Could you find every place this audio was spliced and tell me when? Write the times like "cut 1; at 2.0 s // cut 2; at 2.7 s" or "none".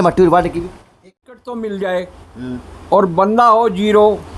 cut 1; at 1.0 s